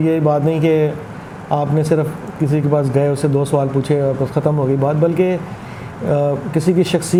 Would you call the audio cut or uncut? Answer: uncut